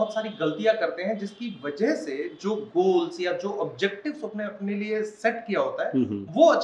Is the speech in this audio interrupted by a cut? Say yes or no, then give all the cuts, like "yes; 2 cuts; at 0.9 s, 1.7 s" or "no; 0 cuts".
no; 0 cuts